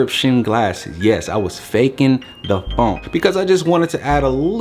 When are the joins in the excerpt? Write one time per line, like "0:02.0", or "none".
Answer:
0:03.1